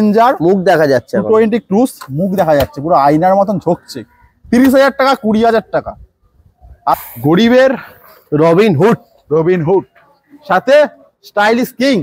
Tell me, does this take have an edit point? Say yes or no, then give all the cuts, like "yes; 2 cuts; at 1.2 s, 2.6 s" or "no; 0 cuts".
yes; 1 cut; at 6.9 s